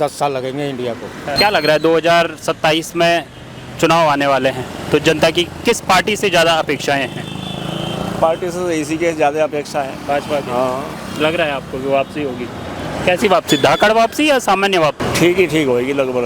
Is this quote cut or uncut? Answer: cut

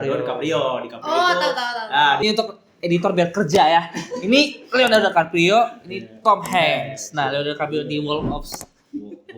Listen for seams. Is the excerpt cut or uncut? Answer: cut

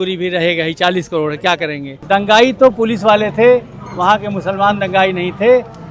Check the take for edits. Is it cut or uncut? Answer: cut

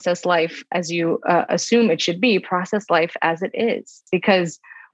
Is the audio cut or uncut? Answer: uncut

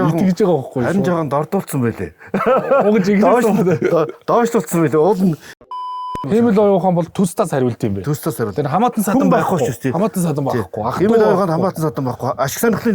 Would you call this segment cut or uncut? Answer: cut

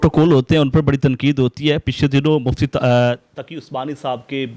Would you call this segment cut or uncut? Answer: uncut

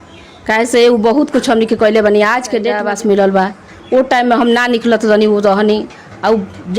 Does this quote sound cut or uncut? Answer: cut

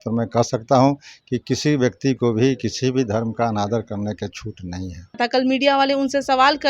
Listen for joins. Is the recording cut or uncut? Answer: cut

